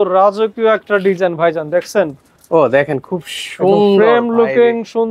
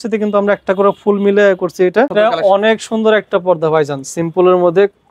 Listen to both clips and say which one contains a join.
second; 1 cut; at 2.1 s

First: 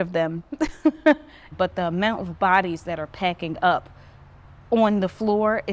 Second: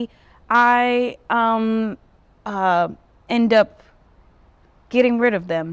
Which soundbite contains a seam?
first; 1 cut; at 1.4 s

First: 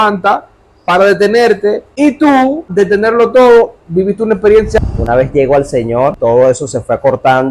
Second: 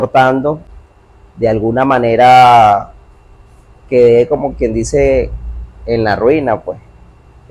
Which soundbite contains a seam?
first; 4 cuts; at 1.9 s, 2.7 s, 4.8 s, 6.2 s

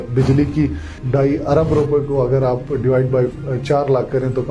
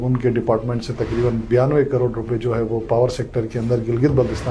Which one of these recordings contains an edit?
first; 1 cut; at 1.1 s

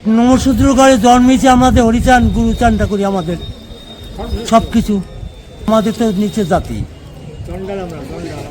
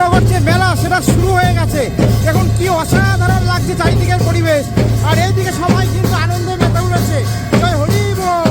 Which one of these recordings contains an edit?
first; 1 cut; at 5.7 s

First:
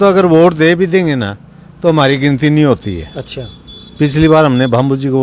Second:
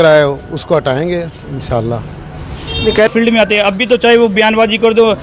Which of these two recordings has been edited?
second; 1 cut; at 3.1 s

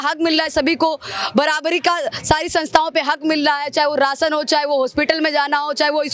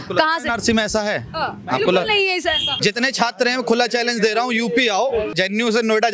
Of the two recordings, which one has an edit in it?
second; 2 cuts; at 2.7 s, 5.3 s

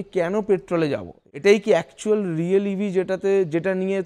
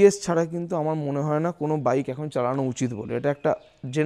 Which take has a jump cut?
first; 1 cut; at 1.2 s

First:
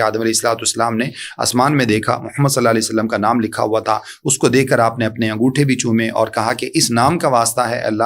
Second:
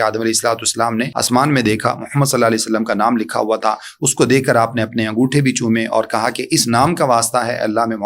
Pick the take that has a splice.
second; 1 cut; at 1.2 s

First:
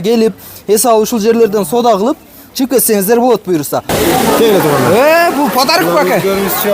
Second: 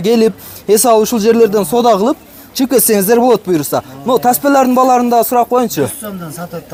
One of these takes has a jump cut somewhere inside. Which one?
first; 1 cut; at 3.9 s

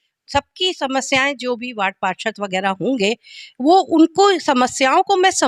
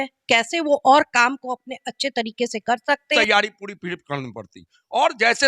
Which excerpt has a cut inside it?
second; 1 cut; at 3.1 s

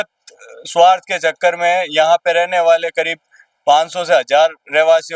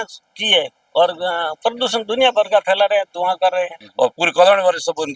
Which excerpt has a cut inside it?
second; 1 cut; at 3.8 s

